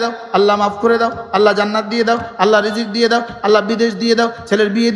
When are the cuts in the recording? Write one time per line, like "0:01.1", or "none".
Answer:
none